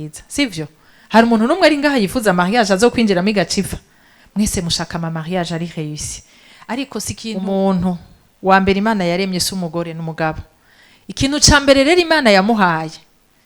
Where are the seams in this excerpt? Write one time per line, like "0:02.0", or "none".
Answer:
0:07.3